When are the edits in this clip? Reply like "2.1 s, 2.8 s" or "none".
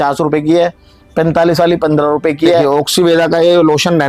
2.6 s